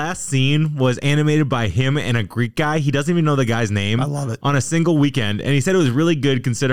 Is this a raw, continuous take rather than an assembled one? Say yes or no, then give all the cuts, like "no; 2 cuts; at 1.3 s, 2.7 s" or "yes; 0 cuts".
yes; 0 cuts